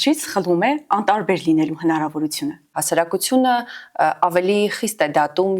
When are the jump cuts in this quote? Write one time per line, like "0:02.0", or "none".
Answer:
0:02.7